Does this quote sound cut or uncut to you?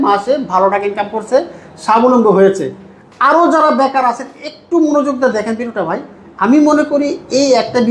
uncut